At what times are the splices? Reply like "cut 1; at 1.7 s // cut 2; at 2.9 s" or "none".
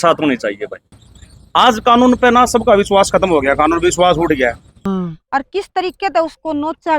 cut 1; at 1.0 s // cut 2; at 4.7 s